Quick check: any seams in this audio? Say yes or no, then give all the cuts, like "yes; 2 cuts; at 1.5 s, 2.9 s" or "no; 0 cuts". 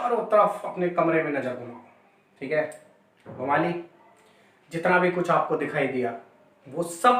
no; 0 cuts